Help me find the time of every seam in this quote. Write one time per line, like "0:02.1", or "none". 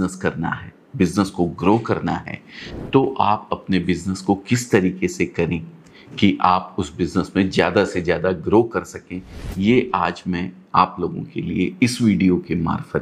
none